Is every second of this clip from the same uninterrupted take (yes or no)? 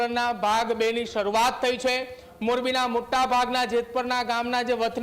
yes